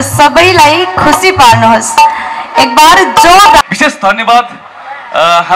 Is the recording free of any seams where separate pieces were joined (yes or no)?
no